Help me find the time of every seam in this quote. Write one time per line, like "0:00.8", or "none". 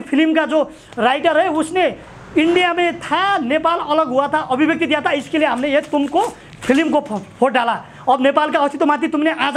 none